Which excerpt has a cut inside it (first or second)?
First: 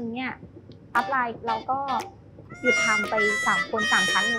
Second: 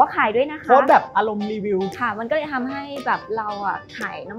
second